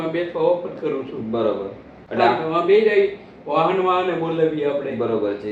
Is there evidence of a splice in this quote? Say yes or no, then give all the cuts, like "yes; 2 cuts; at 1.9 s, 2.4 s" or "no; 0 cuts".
no; 0 cuts